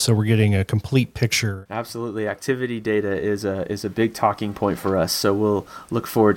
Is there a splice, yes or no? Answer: yes